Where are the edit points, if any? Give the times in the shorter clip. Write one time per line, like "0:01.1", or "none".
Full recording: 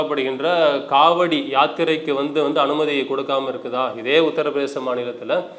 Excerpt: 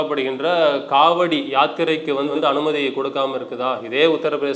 0:02.3